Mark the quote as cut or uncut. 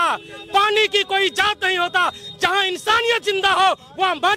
uncut